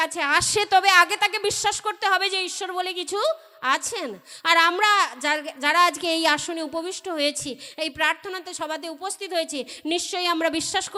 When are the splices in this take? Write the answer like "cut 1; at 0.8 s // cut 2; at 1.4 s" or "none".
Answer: none